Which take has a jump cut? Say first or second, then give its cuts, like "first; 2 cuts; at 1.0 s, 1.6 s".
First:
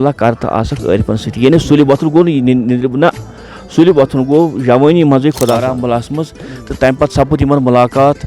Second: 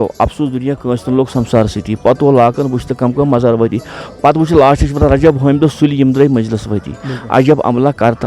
first; 1 cut; at 5.6 s